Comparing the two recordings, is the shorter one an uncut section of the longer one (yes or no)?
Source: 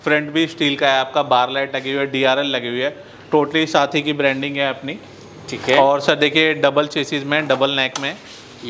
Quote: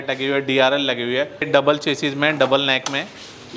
no